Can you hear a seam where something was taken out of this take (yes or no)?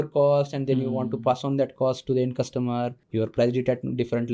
yes